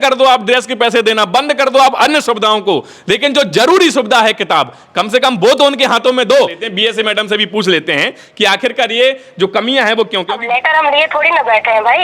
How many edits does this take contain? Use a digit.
2